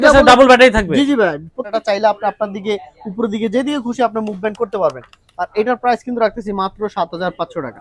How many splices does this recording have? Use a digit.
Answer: 1